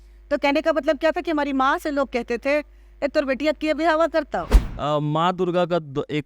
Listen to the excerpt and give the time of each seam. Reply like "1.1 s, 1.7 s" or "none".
4.6 s